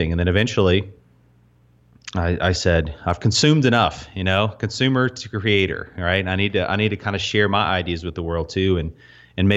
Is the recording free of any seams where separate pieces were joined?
yes; 0 cuts

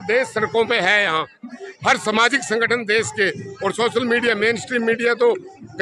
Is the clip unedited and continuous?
yes; 0 cuts

